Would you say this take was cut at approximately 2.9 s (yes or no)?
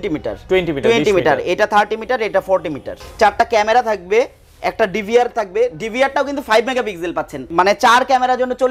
yes